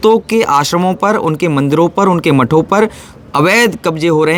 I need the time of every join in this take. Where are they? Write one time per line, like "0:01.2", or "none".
none